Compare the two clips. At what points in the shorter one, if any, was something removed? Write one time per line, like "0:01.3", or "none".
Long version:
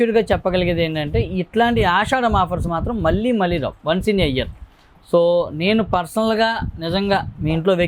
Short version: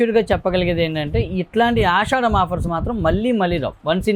none